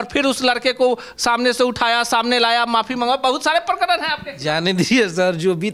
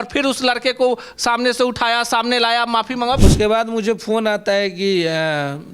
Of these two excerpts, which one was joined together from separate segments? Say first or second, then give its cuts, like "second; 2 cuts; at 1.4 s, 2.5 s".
second; 1 cut; at 3.2 s